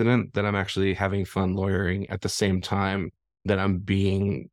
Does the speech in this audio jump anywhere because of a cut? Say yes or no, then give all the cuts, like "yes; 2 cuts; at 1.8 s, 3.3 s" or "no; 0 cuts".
no; 0 cuts